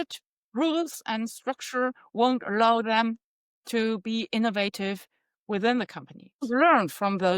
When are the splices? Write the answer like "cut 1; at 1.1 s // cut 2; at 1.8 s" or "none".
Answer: cut 1; at 6.5 s